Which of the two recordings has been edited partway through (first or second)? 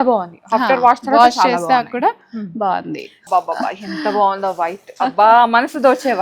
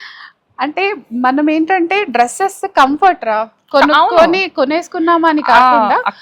first